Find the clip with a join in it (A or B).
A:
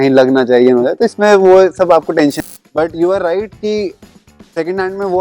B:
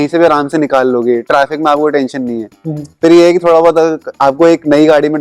A